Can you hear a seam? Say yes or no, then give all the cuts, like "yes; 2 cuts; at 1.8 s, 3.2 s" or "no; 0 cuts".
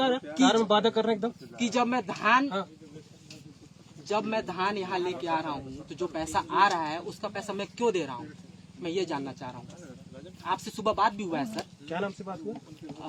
no; 0 cuts